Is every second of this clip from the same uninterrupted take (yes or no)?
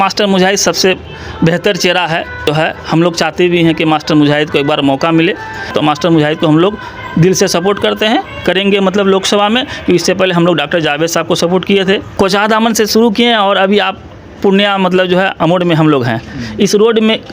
no